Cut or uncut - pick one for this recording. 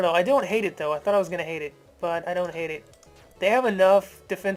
uncut